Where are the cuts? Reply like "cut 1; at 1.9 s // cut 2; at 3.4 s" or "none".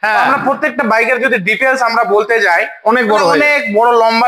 none